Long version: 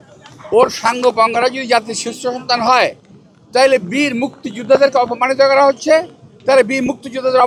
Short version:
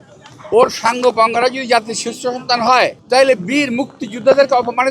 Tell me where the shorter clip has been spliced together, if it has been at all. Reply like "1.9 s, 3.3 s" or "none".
3.0 s